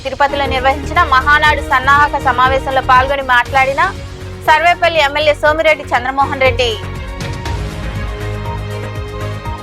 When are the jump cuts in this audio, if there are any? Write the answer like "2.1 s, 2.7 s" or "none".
6.8 s, 8.7 s